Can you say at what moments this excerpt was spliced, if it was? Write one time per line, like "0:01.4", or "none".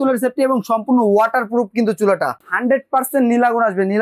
0:02.4